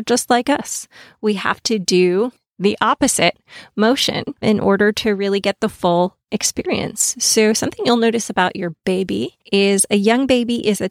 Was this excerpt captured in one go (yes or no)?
no